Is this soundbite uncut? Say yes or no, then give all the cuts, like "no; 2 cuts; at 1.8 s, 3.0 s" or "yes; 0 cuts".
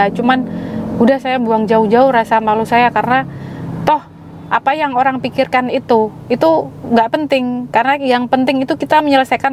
yes; 0 cuts